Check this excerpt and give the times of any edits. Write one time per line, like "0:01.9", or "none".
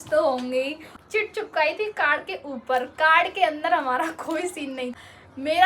0:00.9
0:04.9